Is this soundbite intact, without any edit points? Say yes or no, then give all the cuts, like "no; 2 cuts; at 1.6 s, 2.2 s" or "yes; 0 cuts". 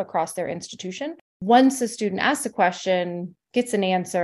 no; 1 cut; at 1.3 s